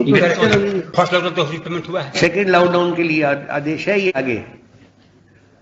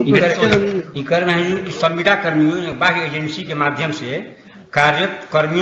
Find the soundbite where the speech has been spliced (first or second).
first